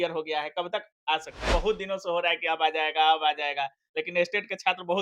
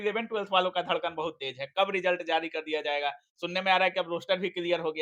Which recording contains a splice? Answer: first; 1 cut; at 1.5 s

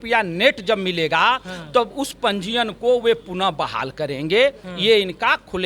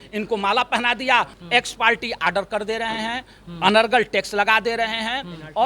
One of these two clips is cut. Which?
second; 1 cut; at 1.3 s

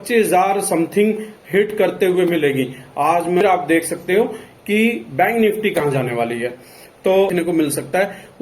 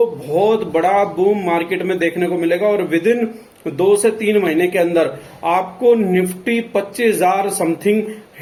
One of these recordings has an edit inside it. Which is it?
first; 2 cuts; at 3.4 s, 7.3 s

